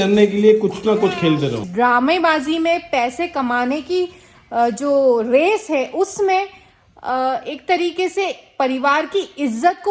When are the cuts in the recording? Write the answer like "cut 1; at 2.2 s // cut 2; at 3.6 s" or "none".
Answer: cut 1; at 1.6 s